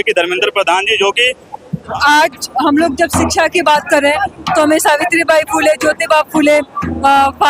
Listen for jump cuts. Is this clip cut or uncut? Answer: cut